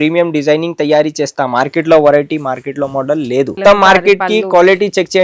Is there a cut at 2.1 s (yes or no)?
no